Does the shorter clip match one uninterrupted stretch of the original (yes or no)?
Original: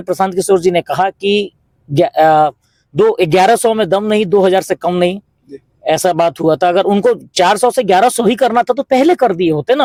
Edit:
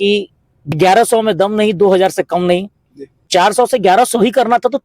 no